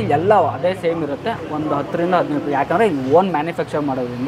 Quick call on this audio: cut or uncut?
uncut